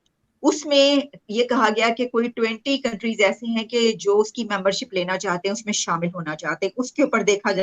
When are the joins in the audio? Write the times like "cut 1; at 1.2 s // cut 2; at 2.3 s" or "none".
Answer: none